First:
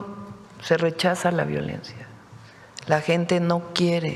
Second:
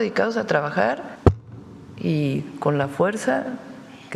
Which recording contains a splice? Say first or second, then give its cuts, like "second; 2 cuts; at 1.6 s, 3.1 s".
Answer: second; 1 cut; at 1.1 s